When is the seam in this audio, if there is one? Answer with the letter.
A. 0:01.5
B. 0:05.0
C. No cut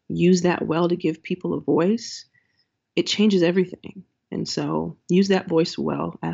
B